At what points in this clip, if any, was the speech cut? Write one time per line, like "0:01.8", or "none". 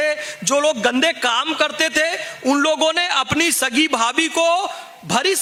none